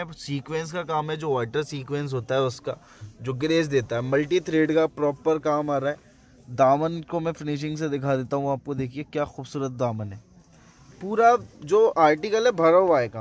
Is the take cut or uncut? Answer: uncut